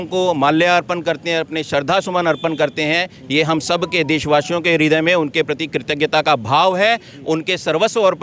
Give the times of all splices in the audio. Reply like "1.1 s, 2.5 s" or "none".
none